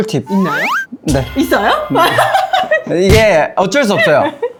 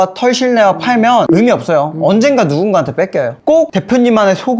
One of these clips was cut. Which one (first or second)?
second